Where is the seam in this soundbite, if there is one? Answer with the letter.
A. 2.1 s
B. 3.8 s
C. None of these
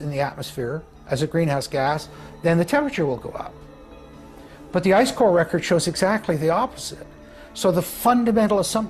C